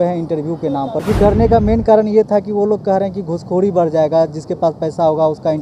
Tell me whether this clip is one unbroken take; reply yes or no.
no